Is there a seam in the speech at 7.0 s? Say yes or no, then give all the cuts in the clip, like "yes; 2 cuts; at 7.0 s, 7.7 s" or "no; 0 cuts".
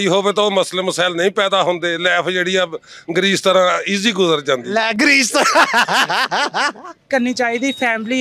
yes; 1 cut; at 7.0 s